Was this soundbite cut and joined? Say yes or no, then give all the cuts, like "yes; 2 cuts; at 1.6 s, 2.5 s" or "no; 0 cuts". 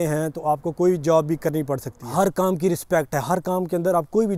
yes; 1 cut; at 2.0 s